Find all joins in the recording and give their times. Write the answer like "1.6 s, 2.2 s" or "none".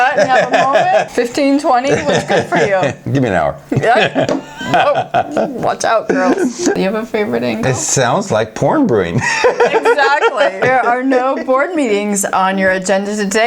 1.1 s, 6.7 s, 10.6 s

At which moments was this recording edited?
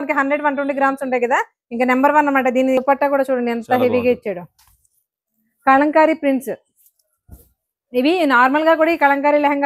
2.8 s

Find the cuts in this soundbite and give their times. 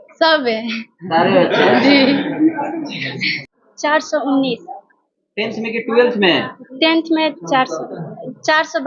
3.4 s

